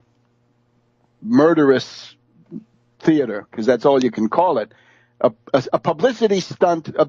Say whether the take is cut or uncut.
cut